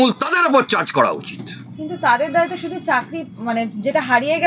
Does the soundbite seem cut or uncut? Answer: uncut